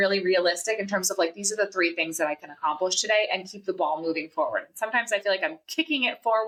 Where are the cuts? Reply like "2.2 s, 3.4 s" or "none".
none